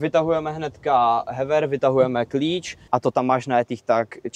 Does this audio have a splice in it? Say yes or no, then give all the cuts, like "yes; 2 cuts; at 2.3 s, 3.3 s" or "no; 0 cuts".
yes; 1 cut; at 2.8 s